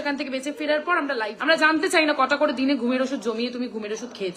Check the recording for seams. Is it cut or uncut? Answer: cut